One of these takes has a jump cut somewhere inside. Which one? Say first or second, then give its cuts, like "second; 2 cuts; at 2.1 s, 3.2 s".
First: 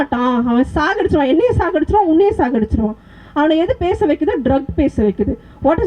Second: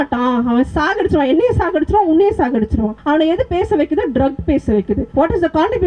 second; 2 cuts; at 3.0 s, 5.1 s